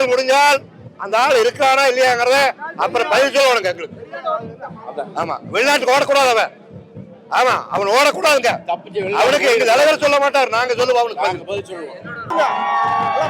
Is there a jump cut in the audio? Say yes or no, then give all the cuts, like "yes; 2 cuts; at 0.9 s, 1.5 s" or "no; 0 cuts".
yes; 1 cut; at 12.3 s